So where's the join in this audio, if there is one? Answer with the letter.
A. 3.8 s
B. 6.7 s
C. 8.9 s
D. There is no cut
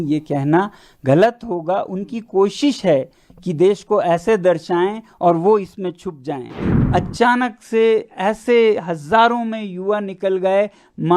B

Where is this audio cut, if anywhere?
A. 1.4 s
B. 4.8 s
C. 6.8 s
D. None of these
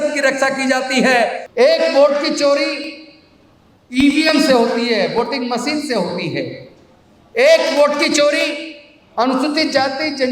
A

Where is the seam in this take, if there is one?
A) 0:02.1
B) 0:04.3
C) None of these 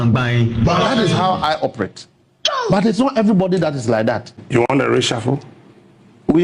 B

